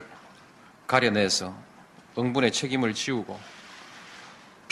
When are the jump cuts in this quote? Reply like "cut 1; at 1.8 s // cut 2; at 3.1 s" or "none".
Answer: none